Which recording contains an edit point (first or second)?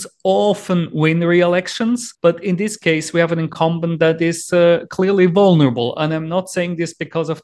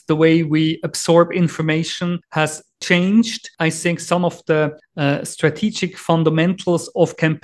second